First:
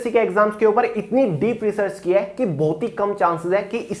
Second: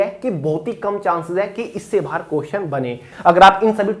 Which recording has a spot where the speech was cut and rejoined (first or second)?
second